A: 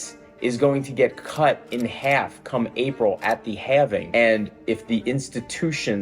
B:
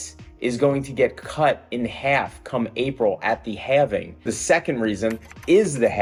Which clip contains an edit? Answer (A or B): A